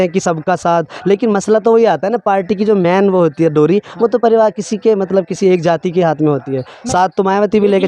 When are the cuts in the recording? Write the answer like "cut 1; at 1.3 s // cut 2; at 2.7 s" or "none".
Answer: none